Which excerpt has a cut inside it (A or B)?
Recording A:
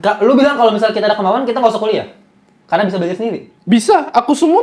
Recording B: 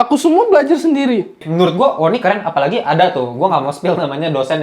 B